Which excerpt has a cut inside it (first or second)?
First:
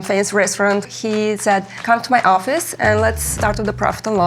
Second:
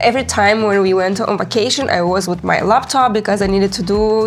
first